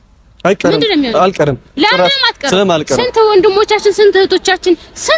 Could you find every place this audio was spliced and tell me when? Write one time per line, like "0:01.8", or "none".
none